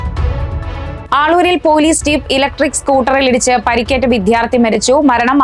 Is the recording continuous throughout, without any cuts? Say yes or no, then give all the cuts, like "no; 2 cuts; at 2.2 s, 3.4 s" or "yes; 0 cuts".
no; 1 cut; at 1.0 s